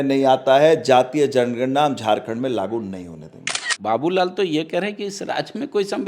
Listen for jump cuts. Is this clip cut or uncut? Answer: cut